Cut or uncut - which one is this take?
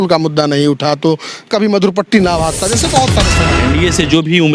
cut